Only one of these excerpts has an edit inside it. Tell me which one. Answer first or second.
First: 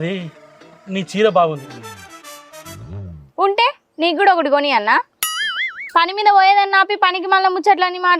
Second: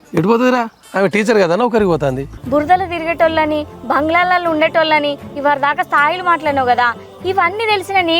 second